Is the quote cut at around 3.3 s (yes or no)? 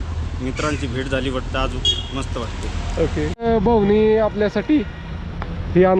yes